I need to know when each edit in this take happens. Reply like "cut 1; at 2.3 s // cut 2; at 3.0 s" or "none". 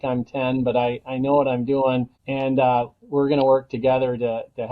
cut 1; at 2.2 s